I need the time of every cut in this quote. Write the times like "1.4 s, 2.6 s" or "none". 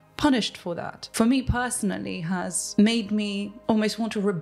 1.0 s, 2.6 s, 3.5 s